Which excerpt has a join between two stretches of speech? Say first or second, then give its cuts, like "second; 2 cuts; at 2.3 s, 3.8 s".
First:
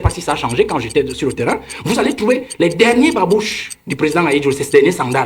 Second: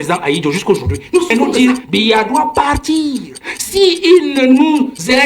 second; 1 cut; at 1.3 s